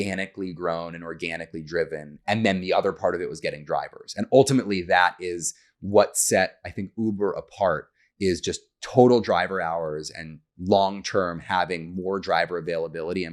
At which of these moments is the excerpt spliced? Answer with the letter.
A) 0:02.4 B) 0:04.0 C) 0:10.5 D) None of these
D